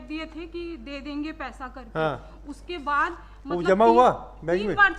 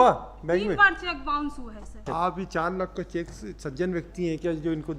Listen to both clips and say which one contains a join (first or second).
second